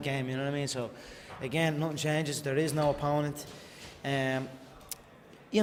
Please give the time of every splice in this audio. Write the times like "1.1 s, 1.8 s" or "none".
none